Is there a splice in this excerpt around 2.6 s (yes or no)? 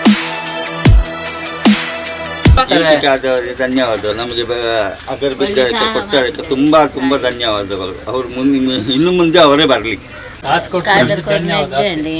yes